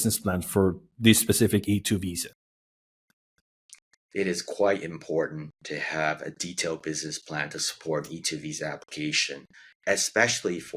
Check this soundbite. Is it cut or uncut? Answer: uncut